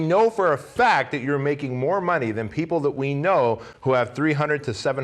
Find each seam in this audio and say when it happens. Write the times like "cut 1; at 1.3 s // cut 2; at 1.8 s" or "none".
none